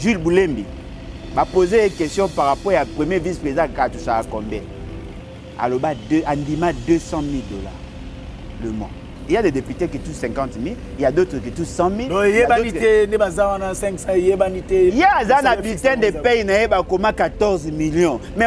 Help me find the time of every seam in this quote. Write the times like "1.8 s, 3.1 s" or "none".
9.1 s

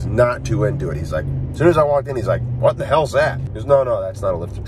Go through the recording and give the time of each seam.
3.5 s

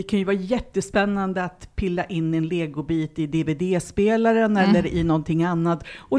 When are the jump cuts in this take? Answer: none

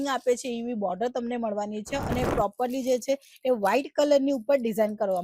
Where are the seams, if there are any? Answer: none

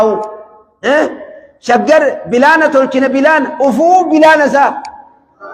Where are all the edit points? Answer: none

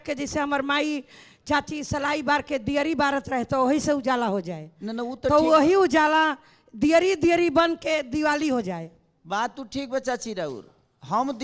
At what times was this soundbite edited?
none

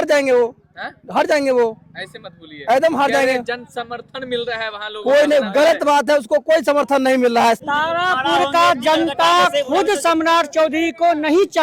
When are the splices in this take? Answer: 7.6 s

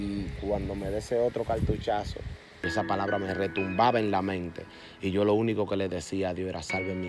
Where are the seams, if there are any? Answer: 2.6 s

